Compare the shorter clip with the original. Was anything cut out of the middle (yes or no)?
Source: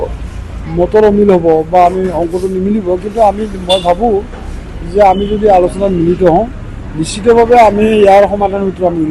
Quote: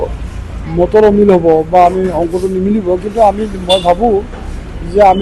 no